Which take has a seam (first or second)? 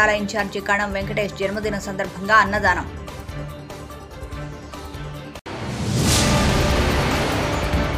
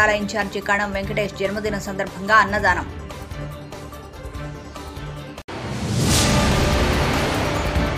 first